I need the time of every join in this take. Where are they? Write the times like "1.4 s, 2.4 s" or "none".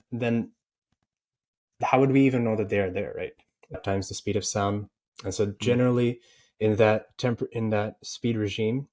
3.8 s